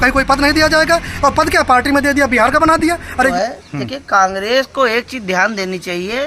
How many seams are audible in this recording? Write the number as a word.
one